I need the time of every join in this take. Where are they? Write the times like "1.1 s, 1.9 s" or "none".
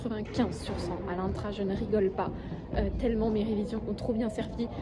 none